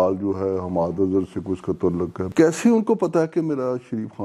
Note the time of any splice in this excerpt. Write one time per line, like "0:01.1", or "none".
0:02.3

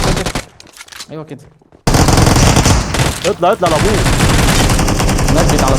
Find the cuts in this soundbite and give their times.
0:01.9

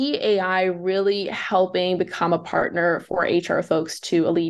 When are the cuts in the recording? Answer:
none

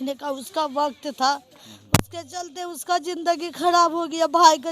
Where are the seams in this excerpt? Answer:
none

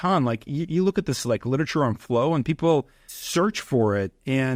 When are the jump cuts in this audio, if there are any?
none

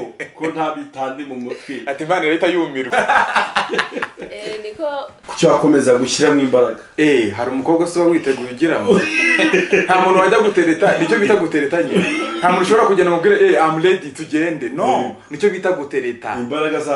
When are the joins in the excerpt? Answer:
0:02.9
0:05.2

